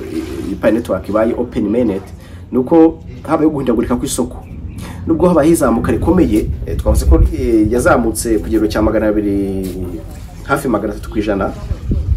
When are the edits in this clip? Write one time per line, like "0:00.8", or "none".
none